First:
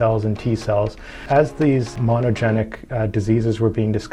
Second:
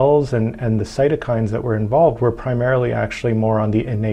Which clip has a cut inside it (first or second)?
first